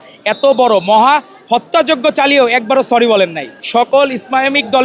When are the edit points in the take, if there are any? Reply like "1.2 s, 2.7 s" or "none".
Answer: 3.5 s